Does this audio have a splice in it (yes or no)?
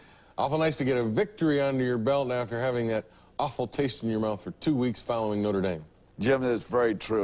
yes